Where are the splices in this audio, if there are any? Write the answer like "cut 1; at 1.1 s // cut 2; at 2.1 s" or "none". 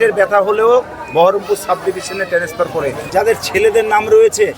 cut 1; at 3.0 s